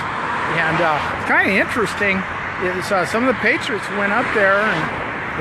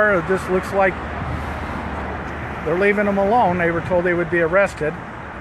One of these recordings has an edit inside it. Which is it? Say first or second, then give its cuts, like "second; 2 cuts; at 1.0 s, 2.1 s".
second; 1 cut; at 2.0 s